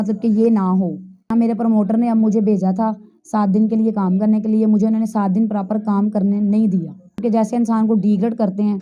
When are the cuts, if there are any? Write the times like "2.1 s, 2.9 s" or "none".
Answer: 1.3 s, 7.2 s